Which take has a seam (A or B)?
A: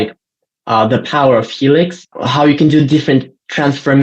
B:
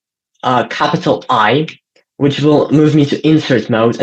A